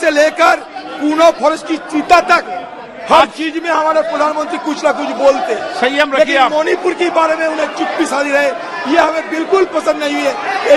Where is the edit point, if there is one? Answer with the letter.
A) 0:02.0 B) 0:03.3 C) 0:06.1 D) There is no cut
D